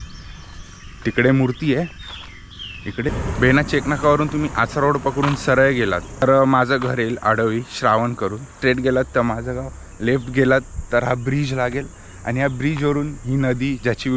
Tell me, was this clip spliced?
yes; 3 cuts; at 3.1 s, 6.2 s, 8.5 s

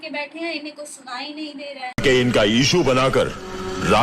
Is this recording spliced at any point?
yes; 1 cut; at 2.0 s

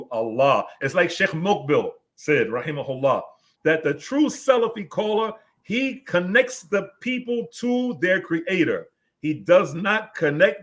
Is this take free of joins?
no; 1 cut; at 3.5 s

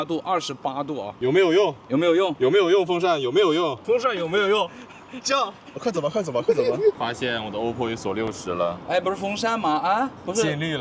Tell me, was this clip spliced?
yes; 3 cuts; at 1.1 s, 3.8 s, 7.0 s

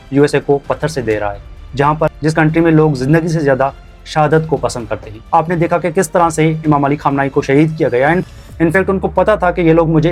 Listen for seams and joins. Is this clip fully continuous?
yes; 0 cuts

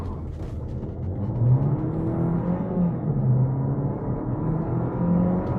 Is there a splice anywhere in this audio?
no; 0 cuts

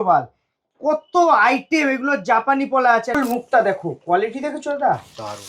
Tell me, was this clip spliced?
yes; 1 cut; at 3.1 s

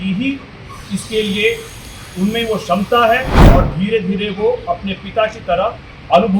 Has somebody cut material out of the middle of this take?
yes; 1 cut; at 3.3 s

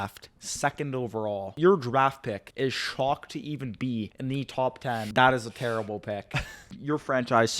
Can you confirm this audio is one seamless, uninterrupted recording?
no; 5 cuts; at 1.6 s, 2.5 s, 4.1 s, 5.1 s, 6.6 s

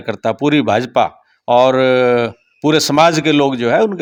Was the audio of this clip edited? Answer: no; 0 cuts

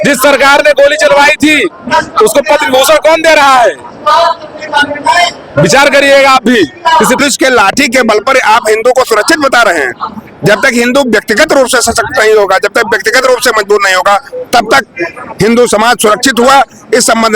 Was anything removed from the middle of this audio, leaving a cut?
yes; 1 cut; at 7.2 s

